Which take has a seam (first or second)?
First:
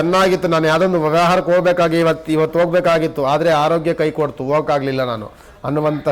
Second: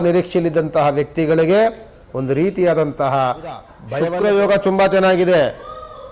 second